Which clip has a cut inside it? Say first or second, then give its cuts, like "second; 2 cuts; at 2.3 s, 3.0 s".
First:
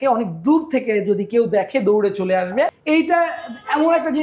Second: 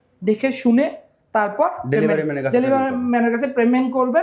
first; 1 cut; at 2.8 s